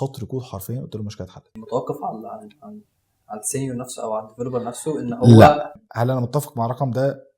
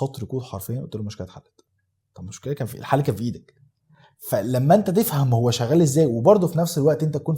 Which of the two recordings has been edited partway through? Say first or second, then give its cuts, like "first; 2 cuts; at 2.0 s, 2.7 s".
first; 2 cuts; at 1.5 s, 5.8 s